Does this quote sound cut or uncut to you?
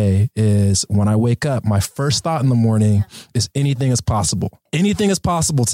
cut